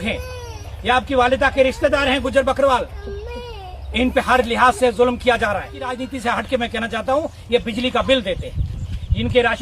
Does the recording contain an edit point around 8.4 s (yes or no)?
no